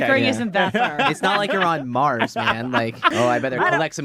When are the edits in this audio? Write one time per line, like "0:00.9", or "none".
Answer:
0:03.1